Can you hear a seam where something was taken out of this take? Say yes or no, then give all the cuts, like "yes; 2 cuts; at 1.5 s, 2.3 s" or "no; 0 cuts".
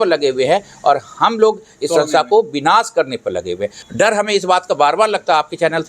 yes; 1 cut; at 3.8 s